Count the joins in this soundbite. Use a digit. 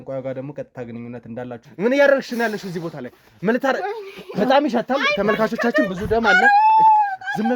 1